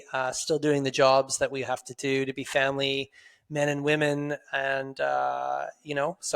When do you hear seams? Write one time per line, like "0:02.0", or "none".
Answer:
none